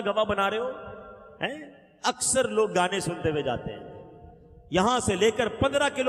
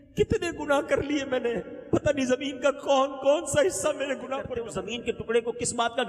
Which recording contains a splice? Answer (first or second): second